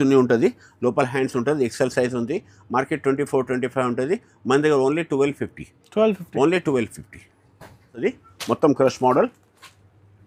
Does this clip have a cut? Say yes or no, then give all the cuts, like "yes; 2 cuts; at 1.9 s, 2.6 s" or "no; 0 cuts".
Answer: no; 0 cuts